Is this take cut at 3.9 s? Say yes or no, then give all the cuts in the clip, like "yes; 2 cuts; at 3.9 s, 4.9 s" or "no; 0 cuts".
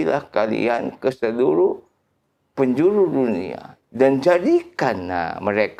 no; 0 cuts